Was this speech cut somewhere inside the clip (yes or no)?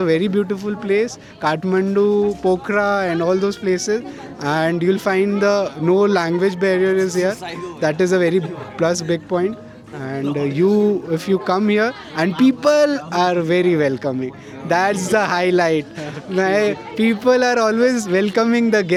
no